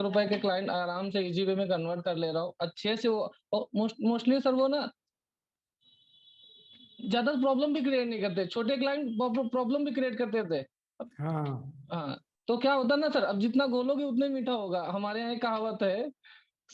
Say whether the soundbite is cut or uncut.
uncut